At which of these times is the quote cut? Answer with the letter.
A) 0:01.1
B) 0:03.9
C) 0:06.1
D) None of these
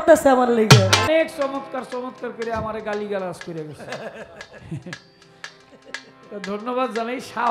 A